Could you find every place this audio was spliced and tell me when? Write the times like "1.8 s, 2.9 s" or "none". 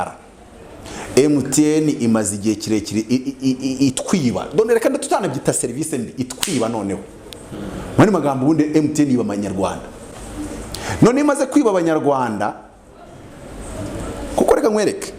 none